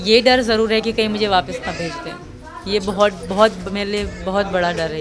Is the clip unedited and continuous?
yes; 0 cuts

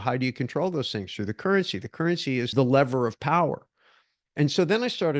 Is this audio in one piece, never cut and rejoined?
no; 1 cut; at 2.5 s

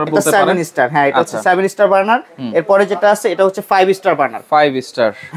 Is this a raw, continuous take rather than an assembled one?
yes; 0 cuts

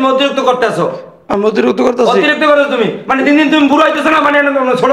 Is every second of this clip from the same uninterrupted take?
yes; 0 cuts

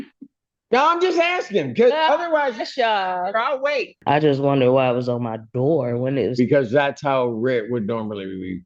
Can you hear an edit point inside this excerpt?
yes; 1 cut; at 3.9 s

